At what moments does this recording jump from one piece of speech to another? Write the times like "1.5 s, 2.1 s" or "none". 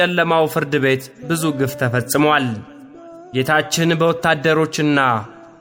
none